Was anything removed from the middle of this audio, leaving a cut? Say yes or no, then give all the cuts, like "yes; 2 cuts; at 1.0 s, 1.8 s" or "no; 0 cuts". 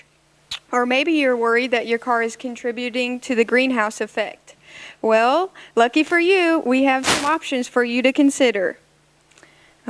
no; 0 cuts